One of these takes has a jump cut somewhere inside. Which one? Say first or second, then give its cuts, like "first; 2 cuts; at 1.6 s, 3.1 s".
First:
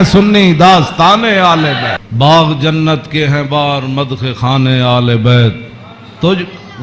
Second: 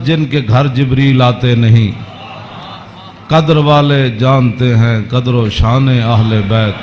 first; 1 cut; at 2.1 s